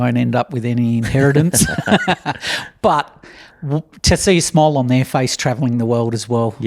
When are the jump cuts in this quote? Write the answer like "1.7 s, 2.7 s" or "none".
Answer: none